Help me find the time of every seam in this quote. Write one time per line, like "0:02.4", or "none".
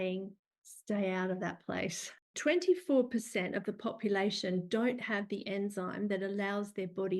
0:02.1